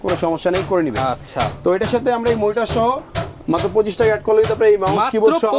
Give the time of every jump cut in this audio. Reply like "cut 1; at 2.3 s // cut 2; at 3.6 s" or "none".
none